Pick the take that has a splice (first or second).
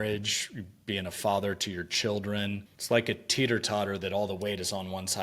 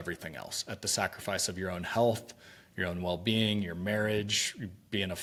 first